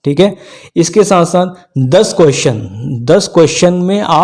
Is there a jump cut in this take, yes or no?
no